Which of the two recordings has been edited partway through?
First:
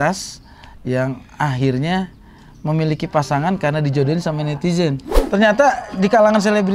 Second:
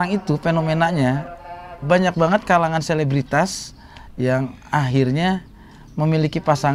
first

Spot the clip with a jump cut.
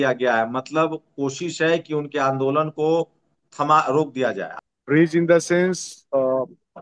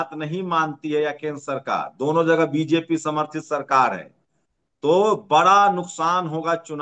first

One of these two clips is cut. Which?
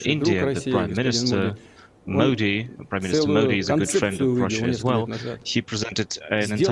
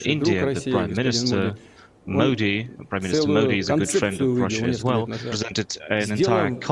second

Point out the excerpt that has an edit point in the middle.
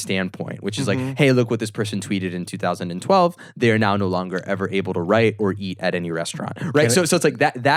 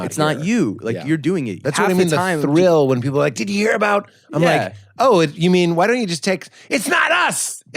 second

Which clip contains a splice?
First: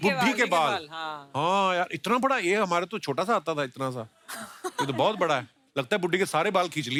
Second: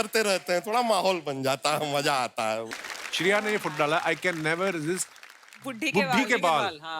second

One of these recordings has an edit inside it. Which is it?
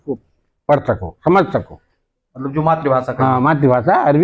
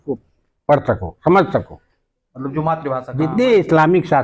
second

